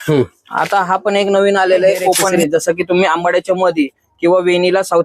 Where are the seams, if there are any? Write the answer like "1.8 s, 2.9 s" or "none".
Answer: 2.3 s